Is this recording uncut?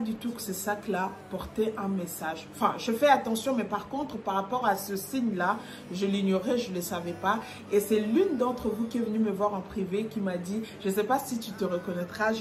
yes; 0 cuts

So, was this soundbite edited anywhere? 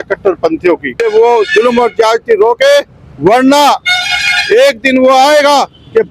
yes; 1 cut; at 0.9 s

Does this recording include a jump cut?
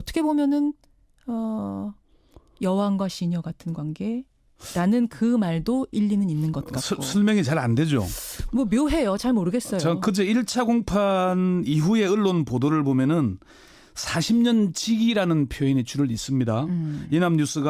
yes; 1 cut; at 5.0 s

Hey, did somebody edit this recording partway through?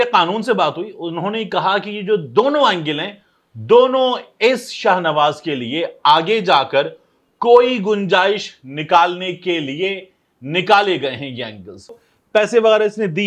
yes; 1 cut; at 12.1 s

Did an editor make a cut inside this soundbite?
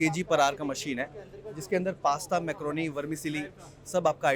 no; 0 cuts

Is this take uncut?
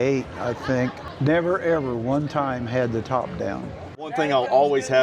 no; 2 cuts; at 1.1 s, 4.1 s

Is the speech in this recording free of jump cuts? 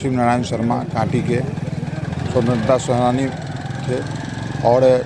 yes; 0 cuts

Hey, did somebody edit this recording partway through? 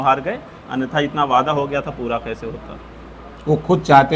no; 0 cuts

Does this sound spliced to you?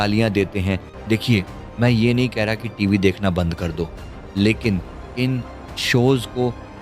yes; 1 cut; at 0.9 s

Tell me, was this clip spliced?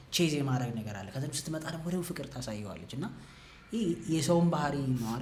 no; 0 cuts

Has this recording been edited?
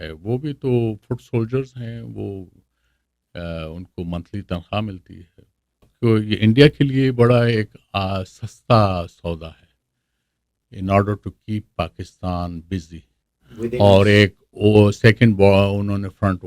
yes; 1 cut; at 5.9 s

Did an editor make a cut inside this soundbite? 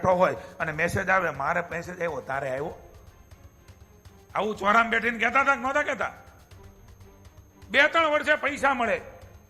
no; 0 cuts

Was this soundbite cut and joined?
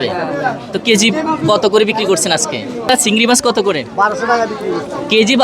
yes; 1 cut; at 2.9 s

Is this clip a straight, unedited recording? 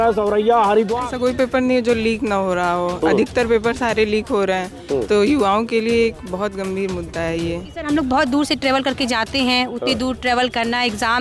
no; 2 cuts; at 1.0 s, 7.7 s

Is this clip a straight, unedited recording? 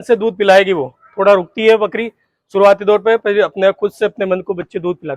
yes; 0 cuts

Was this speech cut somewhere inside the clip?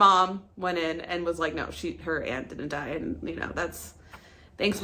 no; 0 cuts

